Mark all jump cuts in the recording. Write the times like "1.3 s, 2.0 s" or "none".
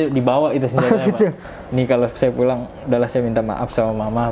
1.4 s

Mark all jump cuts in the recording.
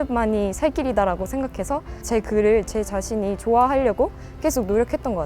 2.0 s

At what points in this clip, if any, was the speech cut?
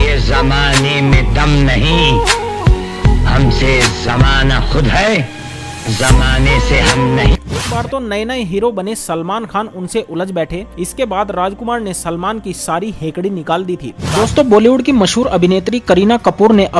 7.7 s, 14.1 s

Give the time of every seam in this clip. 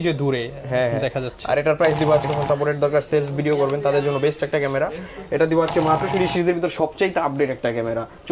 2.3 s, 6.1 s

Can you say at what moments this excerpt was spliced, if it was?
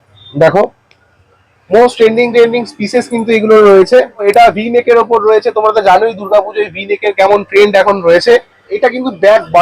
4.2 s, 8.7 s

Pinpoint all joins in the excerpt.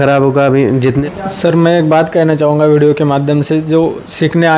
1.0 s

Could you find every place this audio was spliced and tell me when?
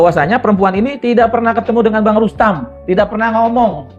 none

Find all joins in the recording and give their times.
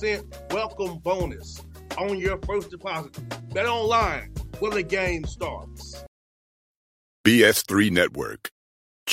6.0 s

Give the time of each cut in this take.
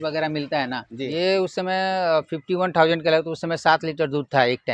0.9 s

